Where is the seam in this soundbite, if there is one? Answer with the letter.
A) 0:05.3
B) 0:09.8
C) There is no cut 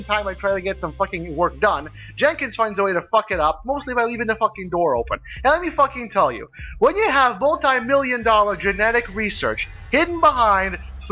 C